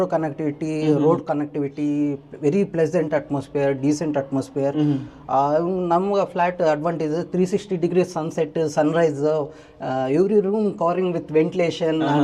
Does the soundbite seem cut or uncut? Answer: uncut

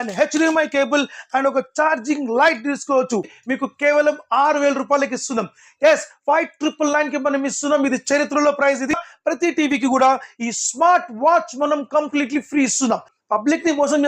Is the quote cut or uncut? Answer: cut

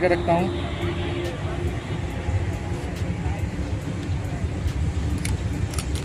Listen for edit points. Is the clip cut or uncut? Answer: uncut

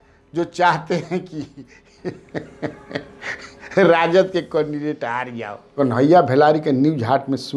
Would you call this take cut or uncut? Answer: cut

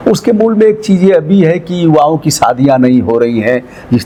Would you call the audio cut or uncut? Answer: uncut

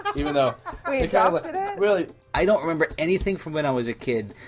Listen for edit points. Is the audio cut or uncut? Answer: cut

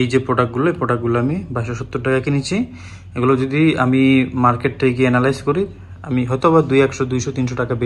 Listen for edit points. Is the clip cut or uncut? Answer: uncut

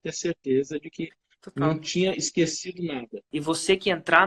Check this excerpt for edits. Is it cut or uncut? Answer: cut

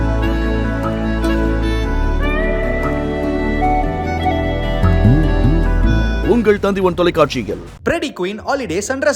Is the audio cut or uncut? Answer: uncut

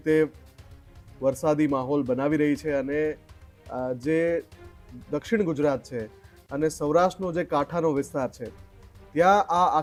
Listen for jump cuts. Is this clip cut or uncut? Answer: uncut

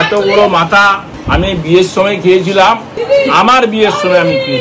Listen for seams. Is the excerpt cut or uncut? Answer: cut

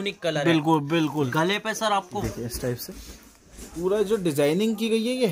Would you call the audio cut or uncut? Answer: cut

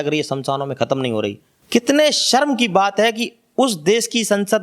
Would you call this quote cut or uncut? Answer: cut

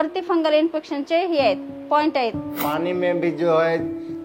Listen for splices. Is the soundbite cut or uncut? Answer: cut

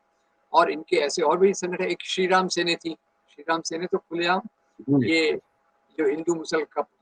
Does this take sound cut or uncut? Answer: uncut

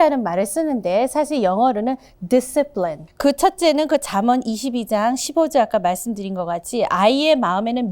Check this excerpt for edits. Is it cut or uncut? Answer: cut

